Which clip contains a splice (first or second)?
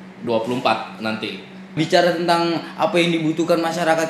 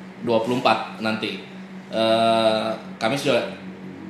first